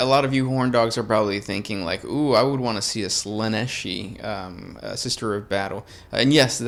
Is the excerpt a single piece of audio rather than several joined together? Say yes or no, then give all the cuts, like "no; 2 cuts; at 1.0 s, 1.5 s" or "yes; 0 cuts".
yes; 0 cuts